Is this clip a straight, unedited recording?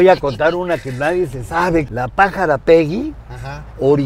no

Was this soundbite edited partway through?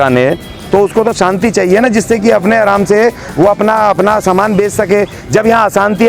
no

